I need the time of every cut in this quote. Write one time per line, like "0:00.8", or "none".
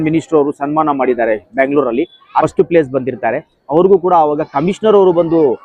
0:02.4

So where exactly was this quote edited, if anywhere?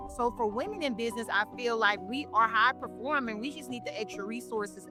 none

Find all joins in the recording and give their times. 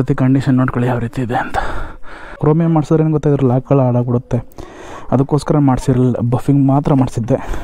0:02.3

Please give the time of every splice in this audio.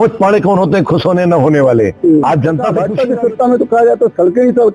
0:02.8

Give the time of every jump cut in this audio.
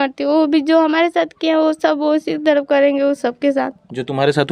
none

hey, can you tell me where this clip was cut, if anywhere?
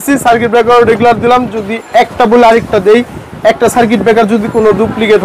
none

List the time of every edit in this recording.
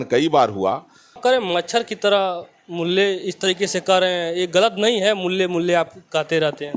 0:01.2

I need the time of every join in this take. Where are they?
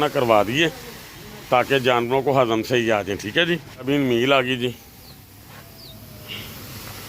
0:03.9

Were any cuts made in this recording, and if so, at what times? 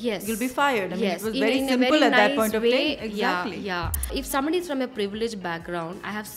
0:04.1

